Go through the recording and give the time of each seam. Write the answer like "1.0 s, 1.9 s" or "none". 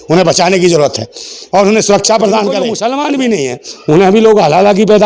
2.7 s